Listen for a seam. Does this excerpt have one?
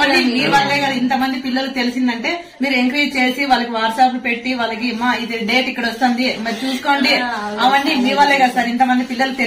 no; 0 cuts

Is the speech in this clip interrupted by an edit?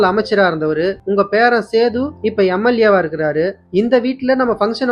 yes; 2 cuts; at 1.0 s, 2.1 s

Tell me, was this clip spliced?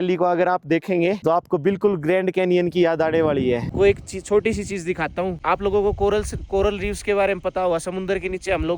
yes; 1 cut; at 3.7 s

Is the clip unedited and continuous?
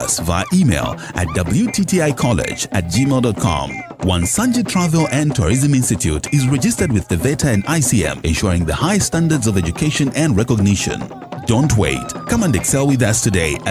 yes; 0 cuts

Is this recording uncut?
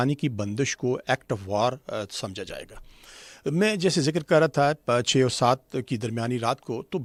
yes; 0 cuts

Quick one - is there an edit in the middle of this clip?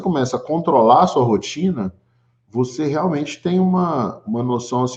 no; 0 cuts

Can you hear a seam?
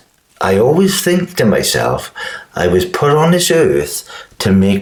no; 0 cuts

